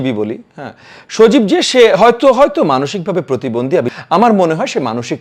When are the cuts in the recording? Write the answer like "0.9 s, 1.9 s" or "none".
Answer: 3.9 s